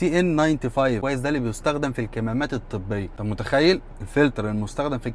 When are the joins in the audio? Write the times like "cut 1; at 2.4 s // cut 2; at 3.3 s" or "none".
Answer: cut 1; at 1.0 s // cut 2; at 3.1 s